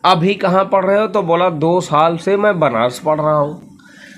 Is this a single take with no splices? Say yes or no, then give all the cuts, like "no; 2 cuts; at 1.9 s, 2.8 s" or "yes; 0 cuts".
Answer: yes; 0 cuts